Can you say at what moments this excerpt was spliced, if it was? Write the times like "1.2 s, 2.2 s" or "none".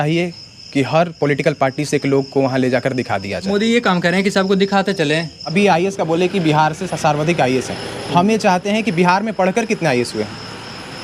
3.5 s, 5.4 s